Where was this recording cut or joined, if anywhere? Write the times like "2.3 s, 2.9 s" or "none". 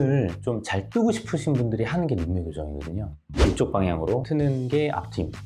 3.2 s, 4.2 s